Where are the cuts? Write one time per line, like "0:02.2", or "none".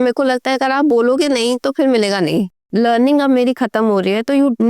0:02.6